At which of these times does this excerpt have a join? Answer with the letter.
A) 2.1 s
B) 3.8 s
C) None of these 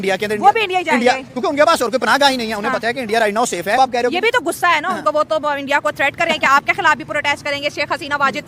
B